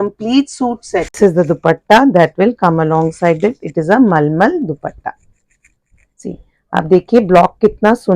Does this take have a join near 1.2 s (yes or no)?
yes